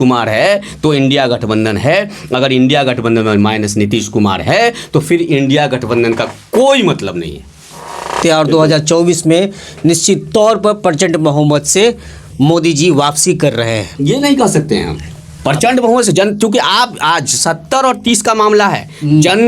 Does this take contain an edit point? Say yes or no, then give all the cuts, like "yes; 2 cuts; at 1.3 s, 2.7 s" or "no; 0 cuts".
yes; 1 cut; at 8.2 s